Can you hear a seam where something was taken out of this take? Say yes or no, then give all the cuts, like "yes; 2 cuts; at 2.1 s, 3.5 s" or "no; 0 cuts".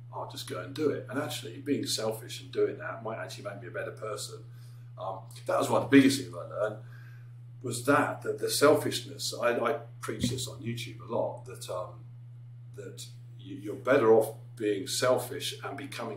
no; 0 cuts